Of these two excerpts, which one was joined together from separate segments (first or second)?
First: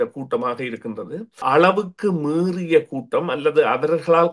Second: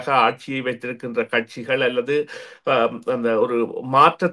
first